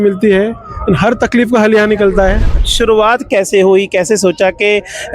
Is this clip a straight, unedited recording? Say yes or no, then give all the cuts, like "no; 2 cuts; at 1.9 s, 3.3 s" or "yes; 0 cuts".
no; 1 cut; at 2.6 s